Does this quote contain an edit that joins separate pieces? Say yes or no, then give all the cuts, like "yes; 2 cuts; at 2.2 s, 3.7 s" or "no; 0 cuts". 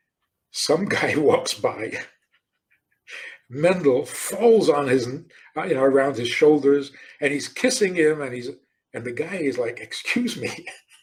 no; 0 cuts